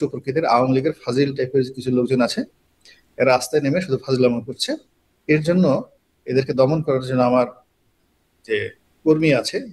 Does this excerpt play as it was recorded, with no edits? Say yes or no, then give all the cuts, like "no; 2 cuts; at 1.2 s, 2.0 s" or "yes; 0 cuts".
yes; 0 cuts